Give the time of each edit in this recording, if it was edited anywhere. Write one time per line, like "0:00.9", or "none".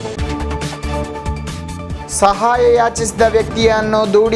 0:01.5